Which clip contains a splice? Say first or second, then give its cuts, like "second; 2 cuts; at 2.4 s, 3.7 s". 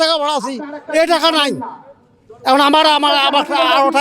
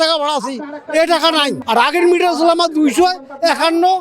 second; 1 cut; at 1.6 s